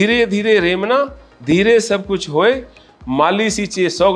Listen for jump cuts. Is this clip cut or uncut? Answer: uncut